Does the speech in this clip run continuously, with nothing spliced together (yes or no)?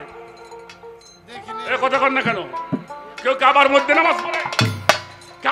yes